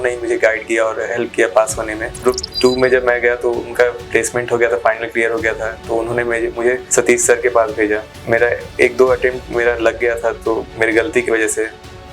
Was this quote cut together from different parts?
yes; 3 cuts; at 2.2 s, 6.8 s, 8.1 s

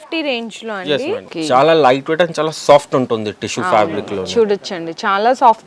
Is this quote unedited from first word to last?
no; 1 cut; at 1.3 s

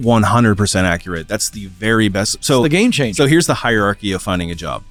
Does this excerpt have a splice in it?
no; 0 cuts

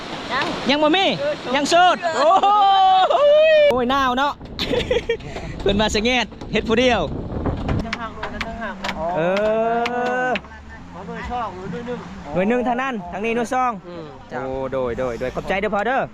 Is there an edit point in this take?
yes; 2 cuts; at 3.7 s, 7.8 s

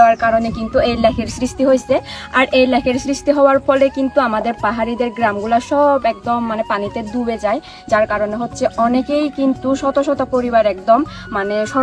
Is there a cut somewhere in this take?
no; 0 cuts

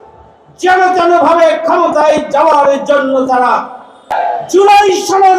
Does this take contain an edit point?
yes; 1 cut; at 4.1 s

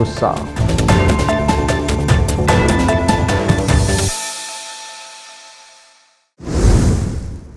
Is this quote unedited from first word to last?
no; 1 cut; at 6.3 s

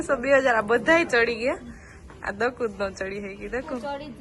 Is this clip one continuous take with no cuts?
yes; 0 cuts

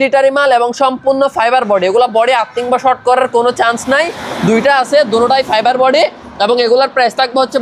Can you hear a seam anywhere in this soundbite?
no; 0 cuts

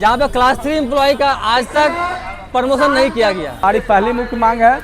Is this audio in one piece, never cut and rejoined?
no; 1 cut; at 3.6 s

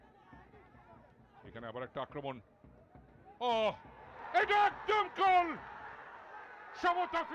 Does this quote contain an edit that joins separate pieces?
no; 0 cuts

